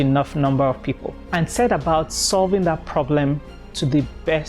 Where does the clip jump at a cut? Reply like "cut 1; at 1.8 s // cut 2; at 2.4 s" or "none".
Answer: cut 1; at 1.1 s